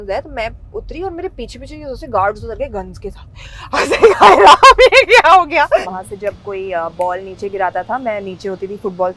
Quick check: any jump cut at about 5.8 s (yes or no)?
yes